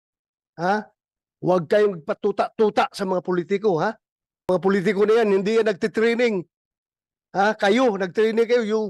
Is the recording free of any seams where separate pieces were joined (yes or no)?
no